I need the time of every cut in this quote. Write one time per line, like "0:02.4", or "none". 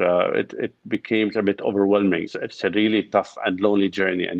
0:02.3

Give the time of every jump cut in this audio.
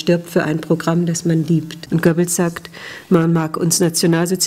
0:01.8

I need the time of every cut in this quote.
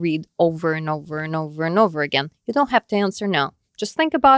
none

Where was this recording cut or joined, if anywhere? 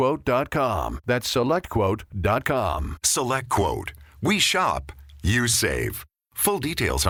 none

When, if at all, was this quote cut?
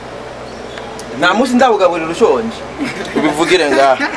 none

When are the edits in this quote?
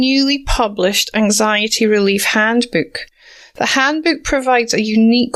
none

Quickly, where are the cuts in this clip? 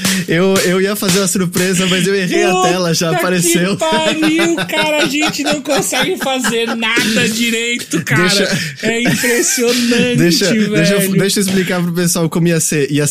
none

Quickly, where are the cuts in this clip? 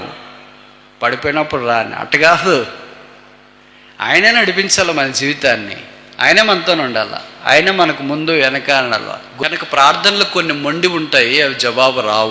0:09.3

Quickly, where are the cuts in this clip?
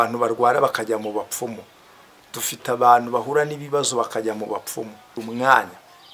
0:05.2

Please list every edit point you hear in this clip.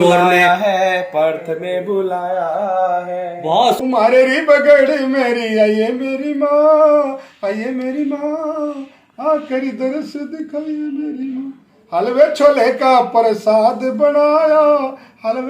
0:03.8

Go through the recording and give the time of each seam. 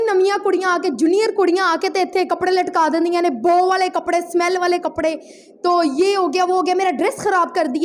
none

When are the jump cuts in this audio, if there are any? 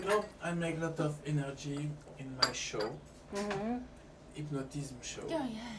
none

